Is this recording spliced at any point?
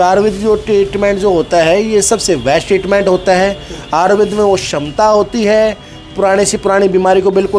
no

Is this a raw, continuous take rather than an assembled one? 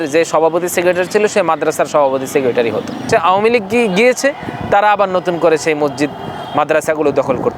no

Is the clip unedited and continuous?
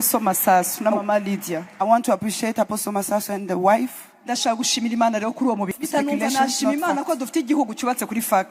no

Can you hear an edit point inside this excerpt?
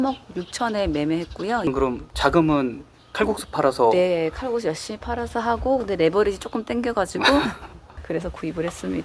no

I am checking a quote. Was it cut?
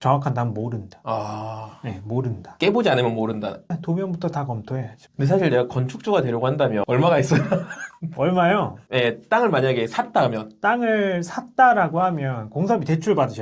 yes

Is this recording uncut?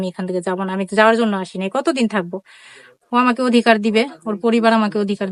yes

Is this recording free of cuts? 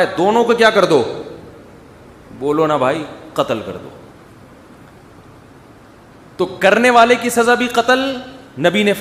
yes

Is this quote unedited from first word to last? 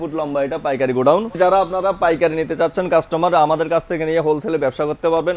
no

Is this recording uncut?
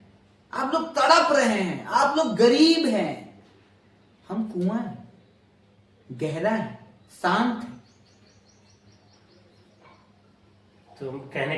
yes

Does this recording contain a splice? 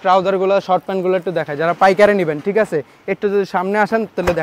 no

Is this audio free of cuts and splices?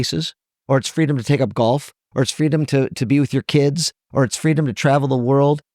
yes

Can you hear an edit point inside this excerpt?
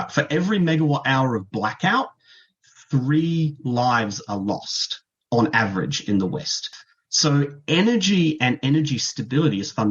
yes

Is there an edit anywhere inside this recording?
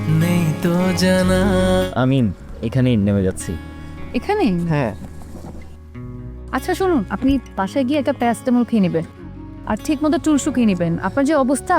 yes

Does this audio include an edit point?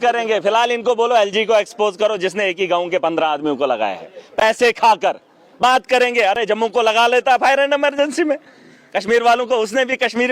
no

